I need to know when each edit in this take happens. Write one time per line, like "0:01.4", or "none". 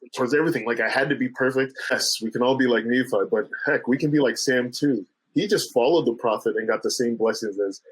0:02.1